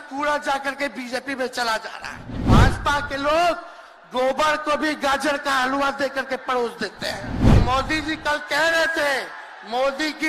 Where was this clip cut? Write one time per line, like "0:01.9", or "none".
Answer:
0:02.4
0:07.4